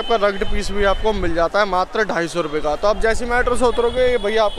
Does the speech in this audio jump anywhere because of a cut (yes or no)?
no